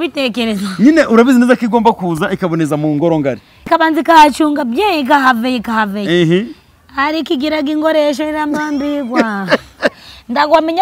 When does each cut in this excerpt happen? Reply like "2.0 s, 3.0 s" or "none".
3.5 s